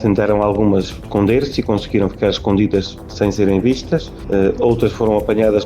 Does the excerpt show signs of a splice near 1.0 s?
yes; 3 cuts; at 1.0 s, 3.0 s, 4.1 s

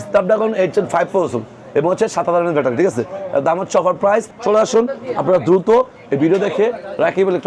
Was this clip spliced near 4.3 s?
yes; 1 cut; at 4.3 s

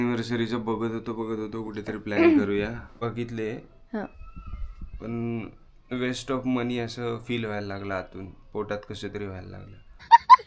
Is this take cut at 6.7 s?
no; 1 cut; at 2.9 s

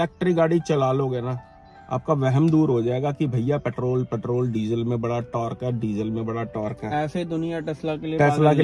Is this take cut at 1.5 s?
no; 0 cuts

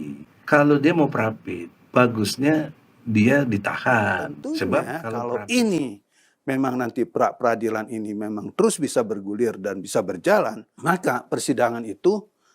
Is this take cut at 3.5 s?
no; 2 cuts; at 5.0 s, 10.7 s

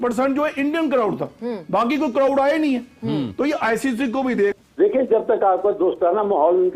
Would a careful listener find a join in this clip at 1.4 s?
no; 1 cut; at 4.6 s

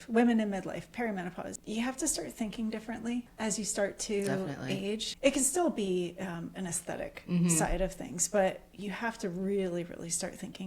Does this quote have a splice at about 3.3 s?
yes; 3 cuts; at 1.5 s, 3.3 s, 5.1 s

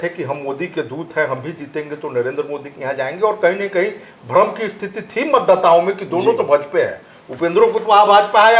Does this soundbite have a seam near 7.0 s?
no; 0 cuts

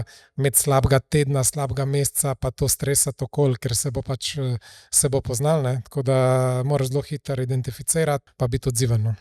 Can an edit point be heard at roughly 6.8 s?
no; 1 cut; at 8.2 s

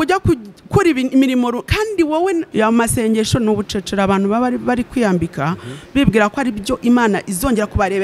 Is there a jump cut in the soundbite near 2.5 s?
yes; 1 cut; at 2.5 s

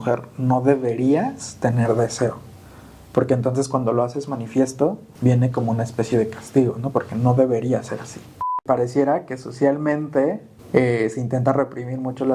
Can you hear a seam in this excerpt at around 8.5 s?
yes; 3 cuts; at 5.1 s, 8.5 s, 10.5 s

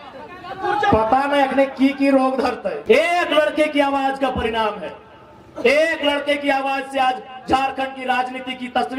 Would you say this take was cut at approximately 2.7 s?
yes; 1 cut; at 2.7 s

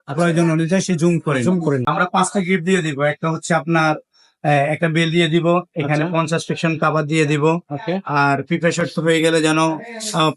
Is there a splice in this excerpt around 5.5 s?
no; 1 cut; at 1.8 s

